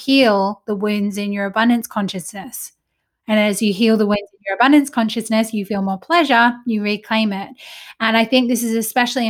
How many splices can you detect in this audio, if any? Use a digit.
0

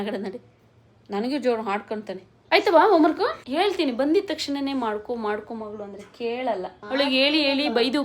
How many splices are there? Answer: 2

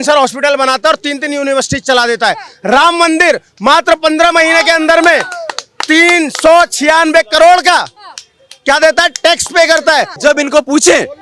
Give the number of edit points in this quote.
1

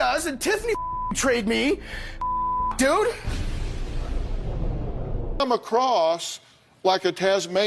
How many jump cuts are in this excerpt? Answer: 1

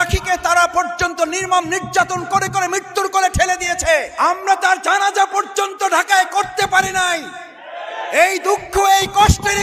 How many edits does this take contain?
1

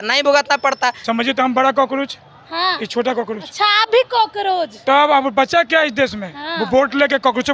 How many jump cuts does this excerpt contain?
1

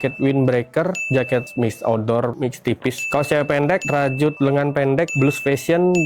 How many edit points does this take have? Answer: 0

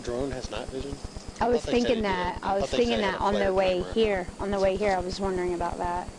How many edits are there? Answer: 0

